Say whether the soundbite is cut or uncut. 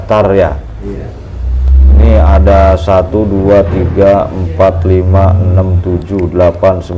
uncut